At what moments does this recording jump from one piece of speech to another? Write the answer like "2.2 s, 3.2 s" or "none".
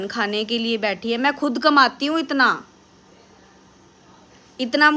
none